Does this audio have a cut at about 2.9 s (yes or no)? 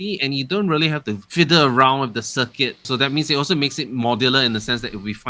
yes